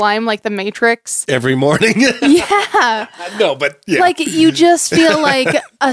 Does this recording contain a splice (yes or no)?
no